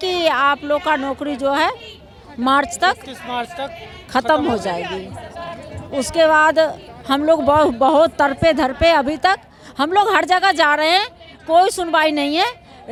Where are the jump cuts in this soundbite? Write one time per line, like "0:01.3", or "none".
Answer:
none